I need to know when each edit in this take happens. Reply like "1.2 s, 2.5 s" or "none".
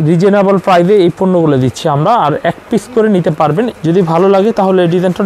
3.7 s

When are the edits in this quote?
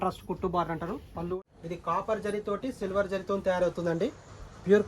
1.3 s

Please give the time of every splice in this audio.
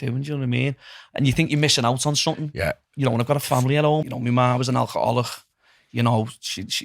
4.1 s

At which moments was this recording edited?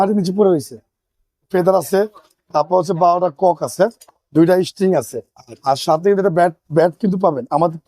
1.4 s

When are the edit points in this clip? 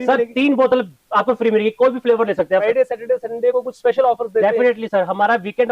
2.6 s

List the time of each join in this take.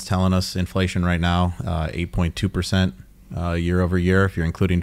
none

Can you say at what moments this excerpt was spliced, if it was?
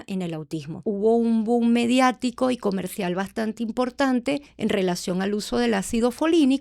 0.8 s, 4.5 s

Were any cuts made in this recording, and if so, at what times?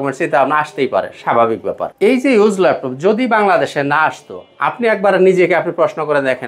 none

